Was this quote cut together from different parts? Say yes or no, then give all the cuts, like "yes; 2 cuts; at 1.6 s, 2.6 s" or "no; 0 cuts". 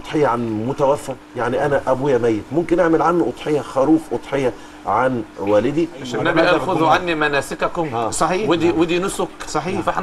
yes; 1 cut; at 6.1 s